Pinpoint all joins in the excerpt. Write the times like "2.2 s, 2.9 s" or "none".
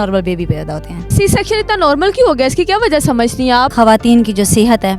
1.1 s, 3.7 s